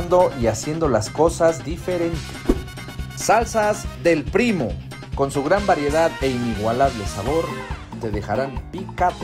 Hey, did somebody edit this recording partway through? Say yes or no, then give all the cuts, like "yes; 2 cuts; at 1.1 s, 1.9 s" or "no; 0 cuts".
no; 0 cuts